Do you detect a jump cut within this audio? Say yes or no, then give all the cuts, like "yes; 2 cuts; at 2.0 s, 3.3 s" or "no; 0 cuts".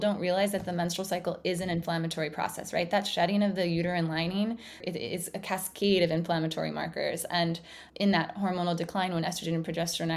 yes; 2 cuts; at 4.8 s, 7.8 s